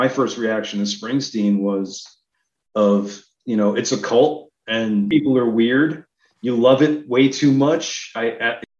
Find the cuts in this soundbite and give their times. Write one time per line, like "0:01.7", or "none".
0:05.1